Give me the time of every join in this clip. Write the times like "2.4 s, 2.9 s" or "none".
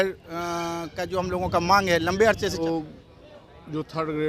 2.6 s